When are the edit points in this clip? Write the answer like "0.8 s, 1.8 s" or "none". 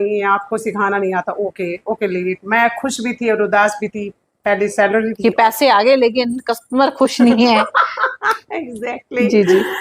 none

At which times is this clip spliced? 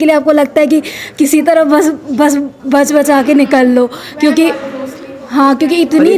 none

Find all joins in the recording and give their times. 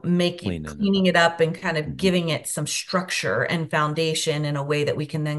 none

